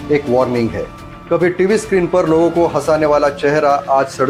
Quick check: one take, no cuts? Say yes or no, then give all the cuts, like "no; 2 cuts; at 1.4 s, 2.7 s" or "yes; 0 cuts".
yes; 0 cuts